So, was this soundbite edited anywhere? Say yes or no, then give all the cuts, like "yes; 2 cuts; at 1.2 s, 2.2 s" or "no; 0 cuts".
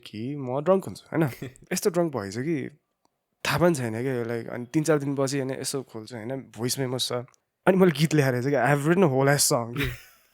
yes; 2 cuts; at 1.5 s, 7.4 s